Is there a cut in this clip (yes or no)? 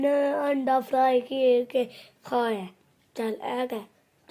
no